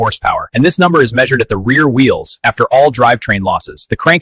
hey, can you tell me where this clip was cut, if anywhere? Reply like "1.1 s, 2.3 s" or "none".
none